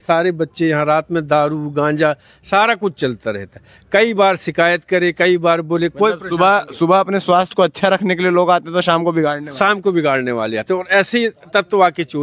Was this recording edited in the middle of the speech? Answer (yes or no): no